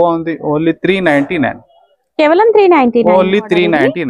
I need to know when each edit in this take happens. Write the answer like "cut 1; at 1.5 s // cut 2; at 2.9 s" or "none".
none